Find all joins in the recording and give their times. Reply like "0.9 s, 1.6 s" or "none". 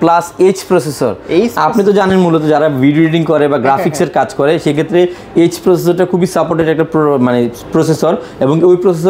none